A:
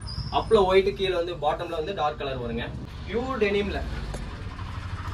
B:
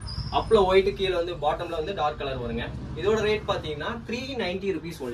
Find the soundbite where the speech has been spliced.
A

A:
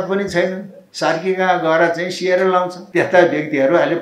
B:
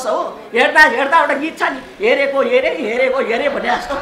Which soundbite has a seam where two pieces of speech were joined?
A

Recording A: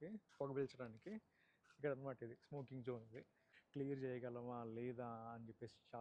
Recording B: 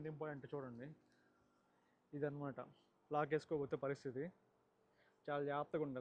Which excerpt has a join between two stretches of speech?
A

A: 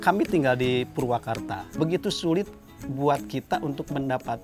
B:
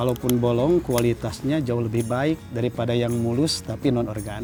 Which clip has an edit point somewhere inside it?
A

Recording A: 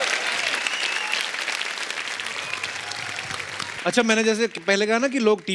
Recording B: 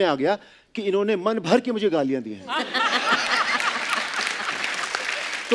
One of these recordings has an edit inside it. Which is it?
A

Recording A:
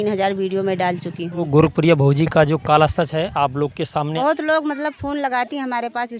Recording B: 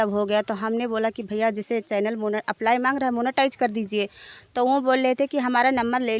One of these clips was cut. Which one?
A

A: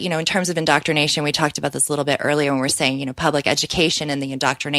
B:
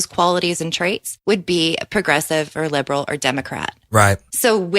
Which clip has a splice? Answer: B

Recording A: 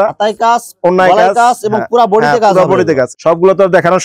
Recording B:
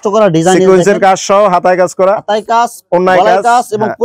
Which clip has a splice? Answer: A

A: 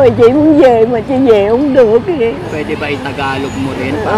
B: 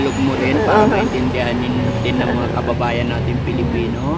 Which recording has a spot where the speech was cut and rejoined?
A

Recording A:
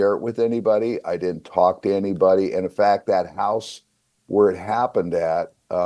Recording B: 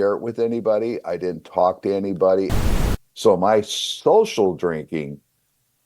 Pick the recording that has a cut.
B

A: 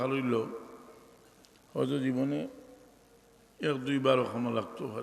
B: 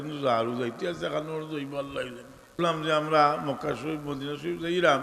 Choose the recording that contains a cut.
B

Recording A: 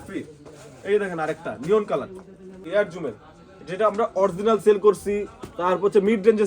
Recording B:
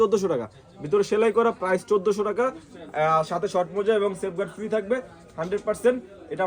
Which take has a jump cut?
A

